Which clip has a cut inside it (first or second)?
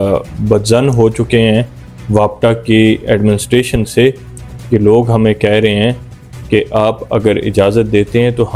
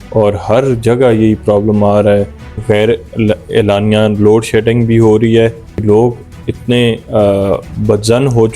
second